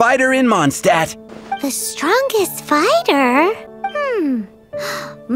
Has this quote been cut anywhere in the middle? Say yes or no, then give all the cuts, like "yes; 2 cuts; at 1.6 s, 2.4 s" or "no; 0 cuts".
yes; 2 cuts; at 1.3 s, 3.7 s